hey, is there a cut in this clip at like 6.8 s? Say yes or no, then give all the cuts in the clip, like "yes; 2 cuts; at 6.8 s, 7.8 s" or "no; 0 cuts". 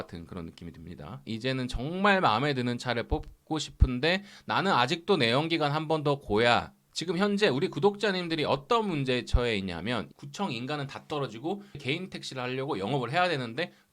yes; 4 cuts; at 1.2 s, 6.8 s, 10.1 s, 11.8 s